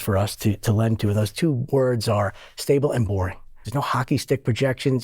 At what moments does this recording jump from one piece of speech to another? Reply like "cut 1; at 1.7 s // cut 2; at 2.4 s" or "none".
cut 1; at 3.7 s

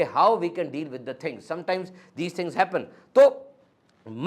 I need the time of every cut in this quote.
none

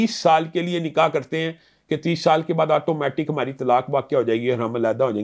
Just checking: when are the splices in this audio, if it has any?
none

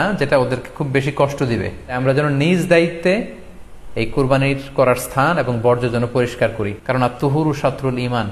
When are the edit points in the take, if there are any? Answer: cut 1; at 2.0 s // cut 2; at 6.8 s

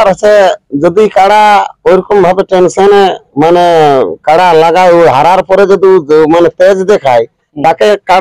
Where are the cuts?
none

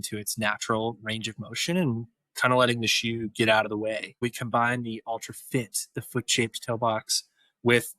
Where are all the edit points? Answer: cut 1; at 4.2 s

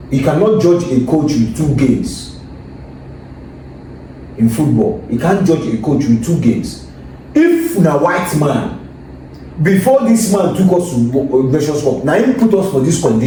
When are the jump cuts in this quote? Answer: none

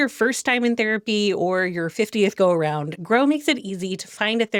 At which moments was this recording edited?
none

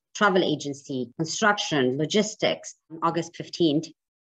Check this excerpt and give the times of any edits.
cut 1; at 3.0 s

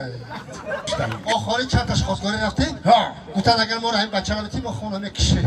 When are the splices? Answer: cut 1; at 1.0 s

